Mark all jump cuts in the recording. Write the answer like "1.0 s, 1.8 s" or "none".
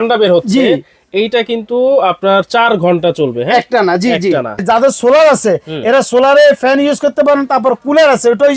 4.6 s